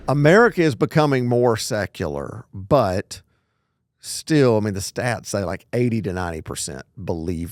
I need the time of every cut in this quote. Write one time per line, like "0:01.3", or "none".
none